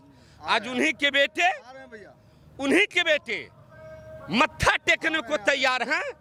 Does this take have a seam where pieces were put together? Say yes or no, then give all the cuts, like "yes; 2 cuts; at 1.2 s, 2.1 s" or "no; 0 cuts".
no; 0 cuts